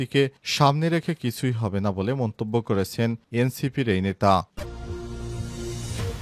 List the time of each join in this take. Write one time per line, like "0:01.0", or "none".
0:04.6